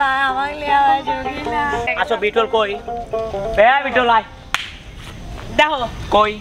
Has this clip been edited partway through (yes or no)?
yes